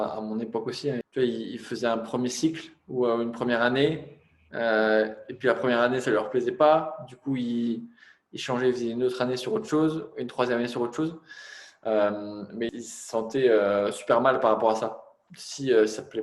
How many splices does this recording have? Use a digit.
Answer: 2